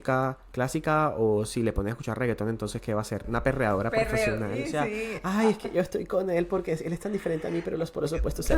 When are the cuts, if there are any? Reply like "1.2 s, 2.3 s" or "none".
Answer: 3.3 s, 4.7 s